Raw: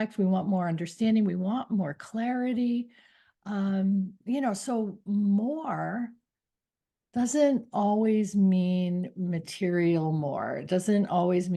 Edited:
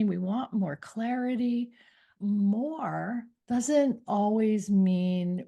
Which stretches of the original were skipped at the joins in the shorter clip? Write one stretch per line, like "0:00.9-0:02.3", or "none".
0:03.3-0:05.0
0:06.2-0:07.0